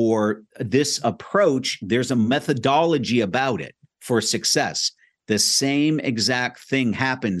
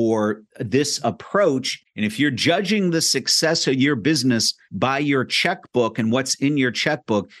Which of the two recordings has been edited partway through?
second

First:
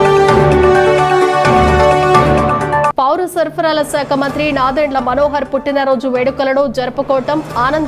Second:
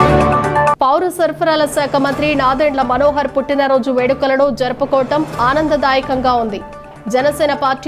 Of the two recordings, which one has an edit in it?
first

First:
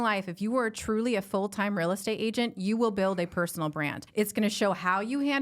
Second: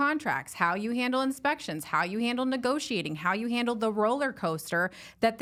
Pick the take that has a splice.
first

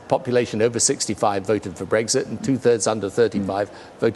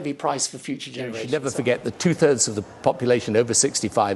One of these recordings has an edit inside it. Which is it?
second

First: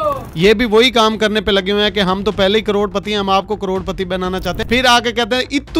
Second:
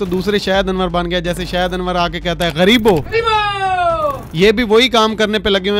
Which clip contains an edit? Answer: first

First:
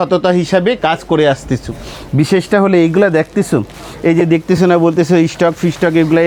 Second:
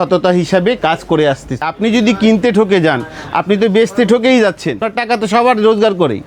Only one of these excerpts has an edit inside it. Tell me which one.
second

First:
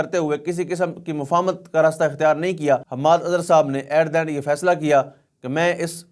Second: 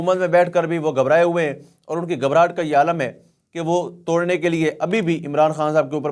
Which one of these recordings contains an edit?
first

